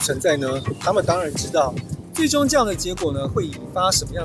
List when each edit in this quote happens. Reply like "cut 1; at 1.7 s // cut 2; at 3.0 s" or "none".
cut 1; at 1.9 s